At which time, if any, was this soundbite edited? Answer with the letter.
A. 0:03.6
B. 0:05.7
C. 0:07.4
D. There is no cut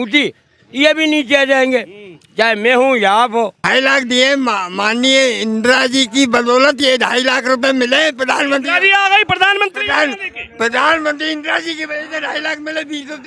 A